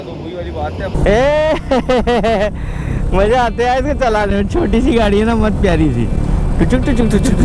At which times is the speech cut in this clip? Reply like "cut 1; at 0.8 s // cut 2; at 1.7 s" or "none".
cut 1; at 0.9 s